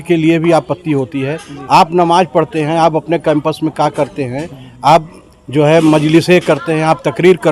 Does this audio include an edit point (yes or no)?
no